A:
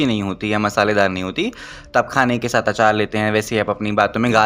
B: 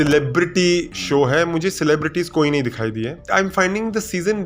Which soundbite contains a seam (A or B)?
B